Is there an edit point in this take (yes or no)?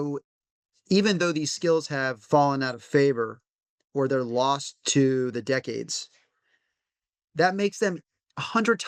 no